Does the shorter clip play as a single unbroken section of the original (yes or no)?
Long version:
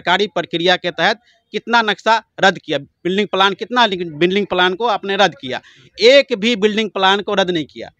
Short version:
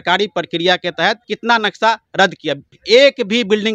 no